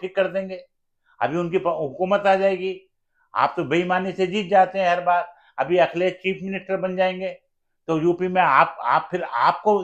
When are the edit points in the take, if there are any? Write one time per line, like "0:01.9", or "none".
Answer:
none

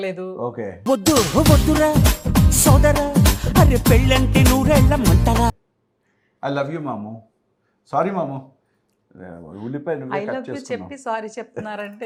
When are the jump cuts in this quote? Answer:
none

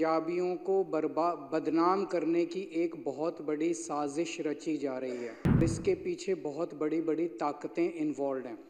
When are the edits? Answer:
0:05.6

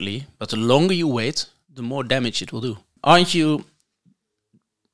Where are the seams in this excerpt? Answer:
0:03.0

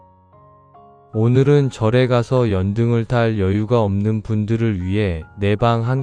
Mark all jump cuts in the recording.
0:01.1

